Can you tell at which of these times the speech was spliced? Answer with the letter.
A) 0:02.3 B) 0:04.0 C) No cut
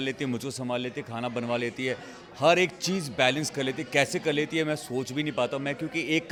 C